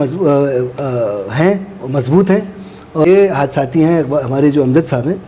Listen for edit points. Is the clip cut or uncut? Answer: cut